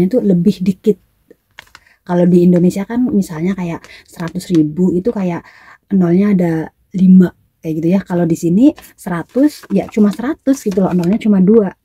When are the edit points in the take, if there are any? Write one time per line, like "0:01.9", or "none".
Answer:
none